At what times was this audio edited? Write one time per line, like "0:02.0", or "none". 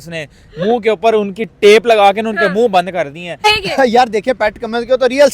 0:03.4